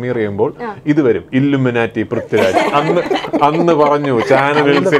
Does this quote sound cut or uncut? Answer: uncut